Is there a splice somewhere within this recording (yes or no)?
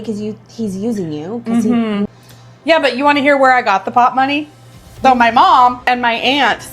yes